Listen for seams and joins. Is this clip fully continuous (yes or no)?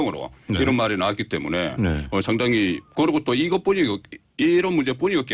no